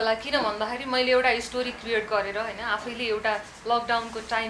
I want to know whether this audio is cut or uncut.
uncut